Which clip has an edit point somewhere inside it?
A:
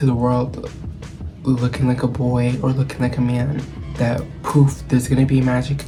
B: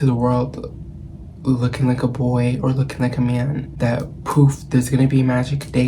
B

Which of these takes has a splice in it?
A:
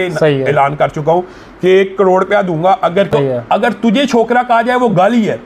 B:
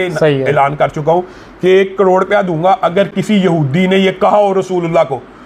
A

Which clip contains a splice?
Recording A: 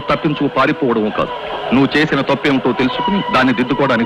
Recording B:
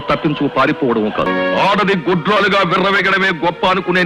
B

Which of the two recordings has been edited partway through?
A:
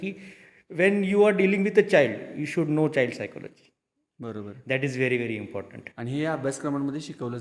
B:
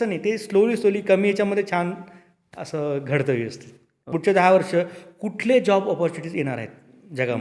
B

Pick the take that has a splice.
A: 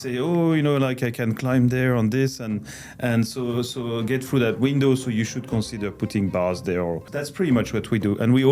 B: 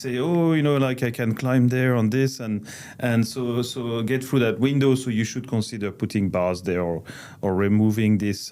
A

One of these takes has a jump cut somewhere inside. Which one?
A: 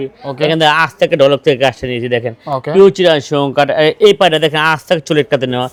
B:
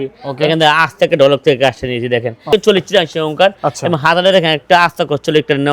B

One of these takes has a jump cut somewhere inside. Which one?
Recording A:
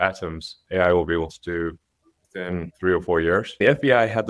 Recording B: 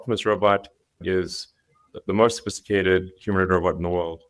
A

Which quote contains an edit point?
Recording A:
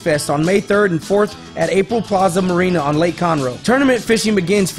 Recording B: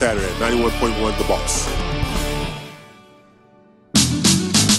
B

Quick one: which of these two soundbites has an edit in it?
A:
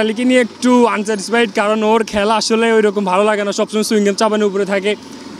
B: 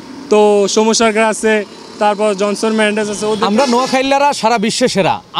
B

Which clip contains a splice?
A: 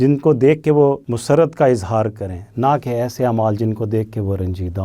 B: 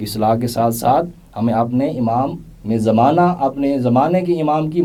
A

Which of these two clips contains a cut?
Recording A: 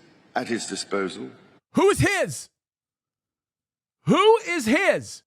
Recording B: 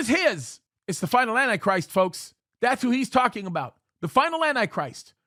A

